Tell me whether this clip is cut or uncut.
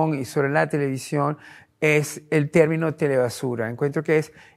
uncut